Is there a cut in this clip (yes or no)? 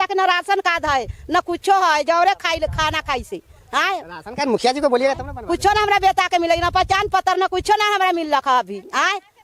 no